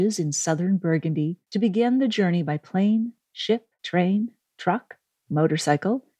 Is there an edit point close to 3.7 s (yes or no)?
yes